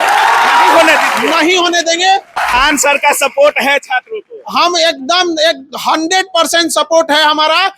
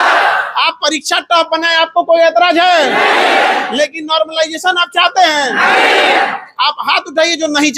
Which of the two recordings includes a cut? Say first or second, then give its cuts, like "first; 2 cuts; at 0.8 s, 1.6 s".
first; 1 cut; at 2.4 s